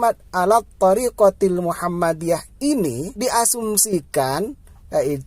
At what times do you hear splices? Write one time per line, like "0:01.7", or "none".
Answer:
0:03.1